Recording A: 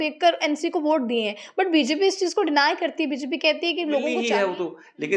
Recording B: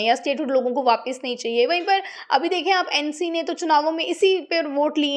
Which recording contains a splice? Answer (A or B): A